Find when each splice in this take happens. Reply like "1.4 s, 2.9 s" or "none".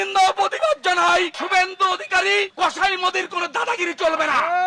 1.4 s